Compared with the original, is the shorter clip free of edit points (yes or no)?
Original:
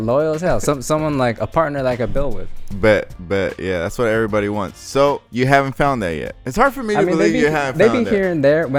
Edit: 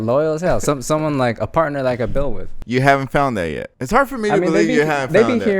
no